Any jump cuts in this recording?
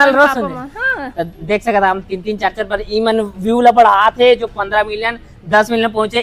no; 0 cuts

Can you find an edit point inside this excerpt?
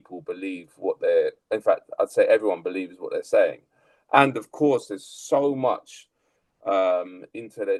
no; 0 cuts

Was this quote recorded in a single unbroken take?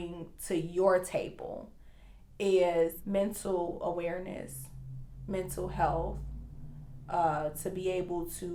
yes; 0 cuts

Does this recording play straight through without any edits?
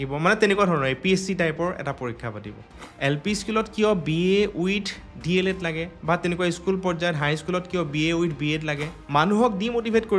no; 2 cuts; at 2.8 s, 8.9 s

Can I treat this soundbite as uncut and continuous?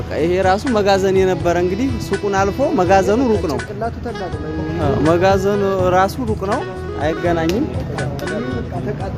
yes; 0 cuts

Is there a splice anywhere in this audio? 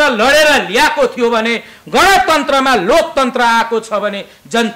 no; 0 cuts

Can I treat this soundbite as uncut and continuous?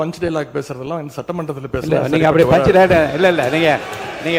yes; 0 cuts

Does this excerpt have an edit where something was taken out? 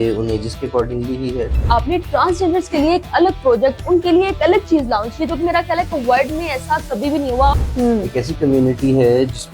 yes; 2 cuts; at 1.6 s, 7.5 s

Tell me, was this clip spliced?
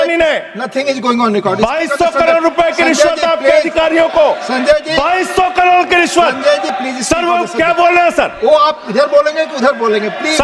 no; 0 cuts

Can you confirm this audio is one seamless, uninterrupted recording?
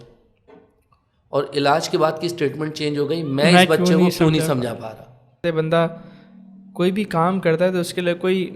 no; 1 cut; at 5.4 s

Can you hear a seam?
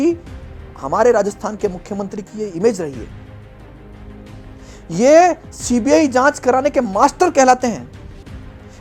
no; 0 cuts

